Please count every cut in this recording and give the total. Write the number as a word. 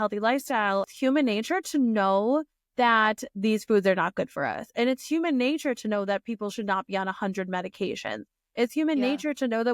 one